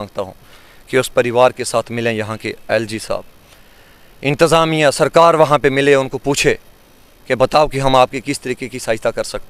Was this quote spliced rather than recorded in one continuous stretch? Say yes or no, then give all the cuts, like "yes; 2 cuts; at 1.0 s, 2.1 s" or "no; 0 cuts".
no; 0 cuts